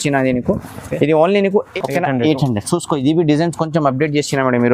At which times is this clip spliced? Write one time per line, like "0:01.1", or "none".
0:01.7